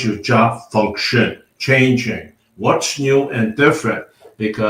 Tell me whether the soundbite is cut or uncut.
uncut